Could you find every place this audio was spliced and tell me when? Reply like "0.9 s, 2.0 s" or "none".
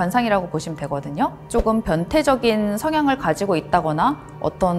1.4 s